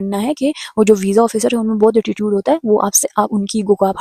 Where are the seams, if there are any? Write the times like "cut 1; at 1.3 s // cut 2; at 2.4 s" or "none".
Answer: none